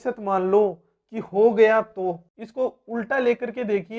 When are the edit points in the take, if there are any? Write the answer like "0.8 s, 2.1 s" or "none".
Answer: 2.4 s